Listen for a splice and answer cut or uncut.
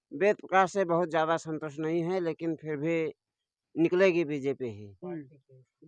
uncut